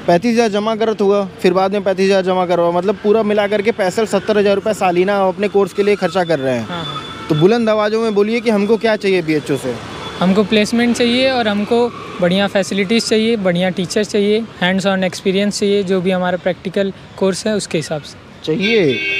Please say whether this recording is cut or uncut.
uncut